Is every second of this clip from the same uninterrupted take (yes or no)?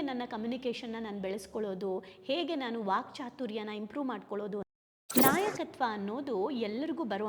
no